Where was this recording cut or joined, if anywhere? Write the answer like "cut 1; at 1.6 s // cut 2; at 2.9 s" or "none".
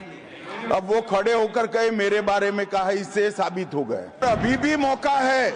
cut 1; at 4.2 s